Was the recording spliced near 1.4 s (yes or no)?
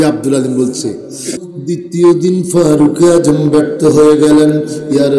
yes